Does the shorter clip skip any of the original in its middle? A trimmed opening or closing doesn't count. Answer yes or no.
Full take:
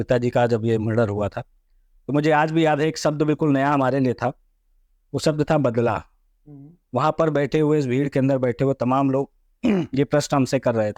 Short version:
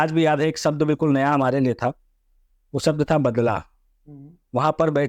no